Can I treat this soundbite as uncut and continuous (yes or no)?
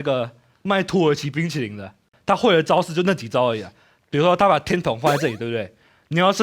no